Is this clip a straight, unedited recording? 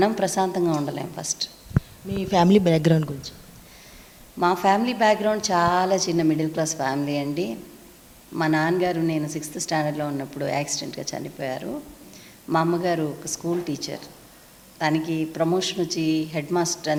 yes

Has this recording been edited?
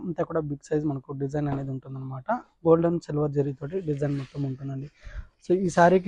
no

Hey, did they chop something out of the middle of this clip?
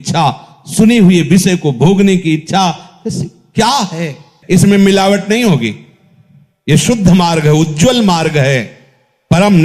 yes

